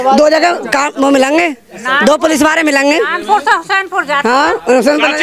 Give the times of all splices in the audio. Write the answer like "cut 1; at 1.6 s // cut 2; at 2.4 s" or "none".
none

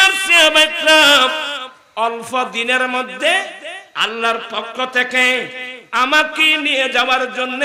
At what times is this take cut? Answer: none

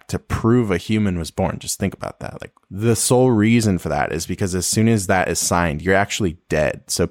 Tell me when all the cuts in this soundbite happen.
none

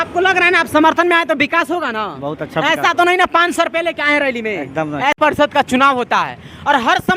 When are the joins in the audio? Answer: cut 1; at 5.2 s

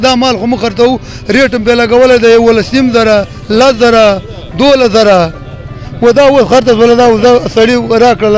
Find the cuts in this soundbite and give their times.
none

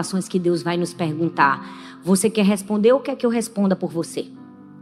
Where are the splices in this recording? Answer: none

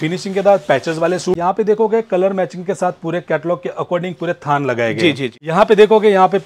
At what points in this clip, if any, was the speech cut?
cut 1; at 1.4 s // cut 2; at 5.4 s

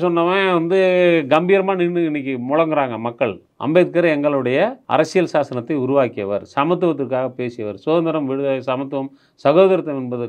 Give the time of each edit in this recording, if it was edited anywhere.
cut 1; at 3.5 s // cut 2; at 4.8 s

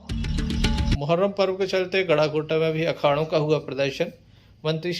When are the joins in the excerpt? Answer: cut 1; at 1.0 s

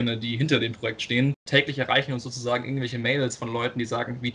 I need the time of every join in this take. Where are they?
cut 1; at 1.4 s

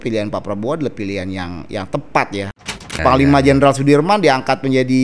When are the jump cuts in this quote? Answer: cut 1; at 2.9 s

